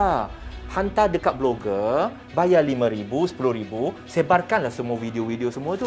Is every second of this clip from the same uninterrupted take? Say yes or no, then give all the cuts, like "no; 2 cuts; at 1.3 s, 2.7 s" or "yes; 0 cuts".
yes; 0 cuts